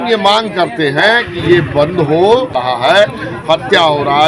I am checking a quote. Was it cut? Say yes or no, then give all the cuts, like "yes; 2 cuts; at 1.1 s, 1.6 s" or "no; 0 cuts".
yes; 1 cut; at 2.6 s